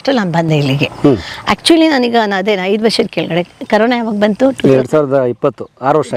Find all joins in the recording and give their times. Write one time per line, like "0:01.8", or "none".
none